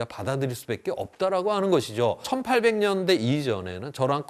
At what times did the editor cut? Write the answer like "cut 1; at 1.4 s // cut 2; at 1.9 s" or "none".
cut 1; at 2.3 s